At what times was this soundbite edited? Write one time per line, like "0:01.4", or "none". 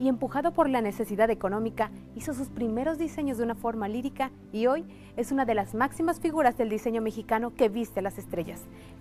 none